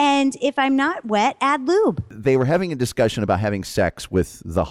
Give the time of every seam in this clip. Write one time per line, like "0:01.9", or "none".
0:02.1